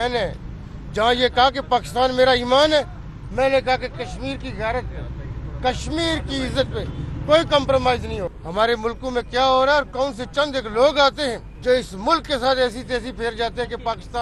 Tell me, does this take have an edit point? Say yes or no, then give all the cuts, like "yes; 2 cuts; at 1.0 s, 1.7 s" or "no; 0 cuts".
yes; 2 cuts; at 8.4 s, 11.5 s